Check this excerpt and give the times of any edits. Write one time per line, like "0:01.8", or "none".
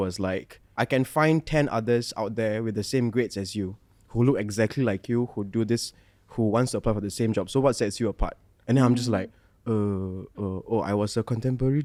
none